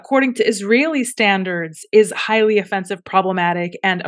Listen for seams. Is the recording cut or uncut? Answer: uncut